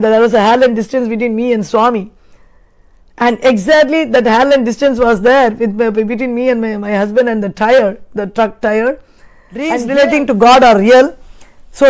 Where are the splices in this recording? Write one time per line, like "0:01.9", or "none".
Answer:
0:09.8